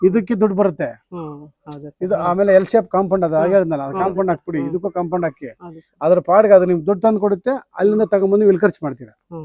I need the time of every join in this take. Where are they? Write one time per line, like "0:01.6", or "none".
none